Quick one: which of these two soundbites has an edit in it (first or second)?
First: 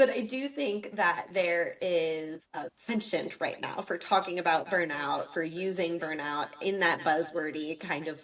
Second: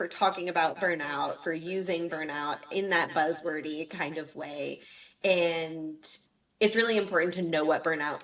first